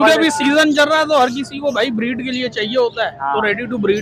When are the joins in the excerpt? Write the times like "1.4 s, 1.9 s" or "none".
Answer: none